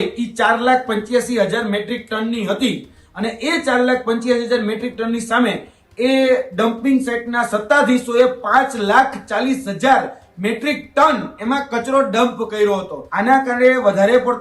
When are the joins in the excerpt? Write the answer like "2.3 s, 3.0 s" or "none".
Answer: 13.0 s